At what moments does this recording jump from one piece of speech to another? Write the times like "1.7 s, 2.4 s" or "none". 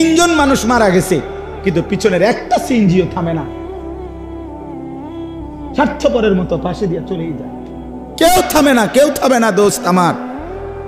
3.5 s, 5.8 s

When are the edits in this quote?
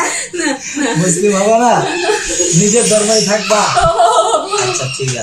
none

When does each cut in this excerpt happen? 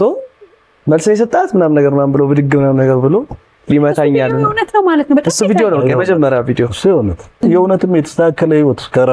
7.4 s

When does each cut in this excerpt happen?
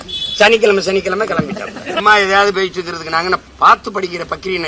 2.0 s, 3.5 s

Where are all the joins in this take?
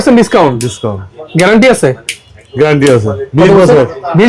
none

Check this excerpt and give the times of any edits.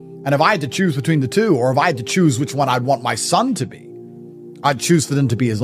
none

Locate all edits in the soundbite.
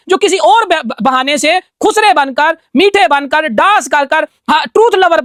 none

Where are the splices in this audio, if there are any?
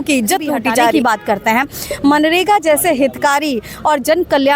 0.9 s

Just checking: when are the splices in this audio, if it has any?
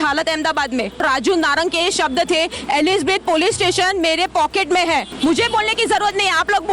1.0 s, 5.1 s

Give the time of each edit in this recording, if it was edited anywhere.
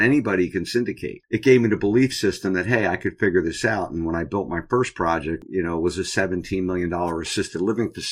1.1 s, 5.4 s

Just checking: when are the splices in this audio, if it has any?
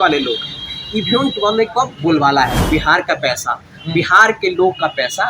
2.6 s

